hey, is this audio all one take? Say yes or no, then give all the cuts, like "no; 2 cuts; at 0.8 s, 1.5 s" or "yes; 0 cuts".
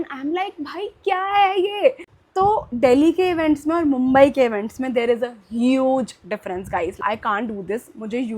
no; 2 cuts; at 2.1 s, 7.0 s